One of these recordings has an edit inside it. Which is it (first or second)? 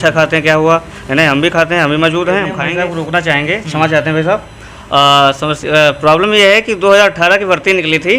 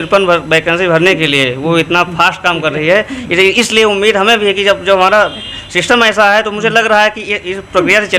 first